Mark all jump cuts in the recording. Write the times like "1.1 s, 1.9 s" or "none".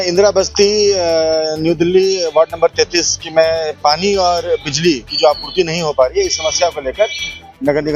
none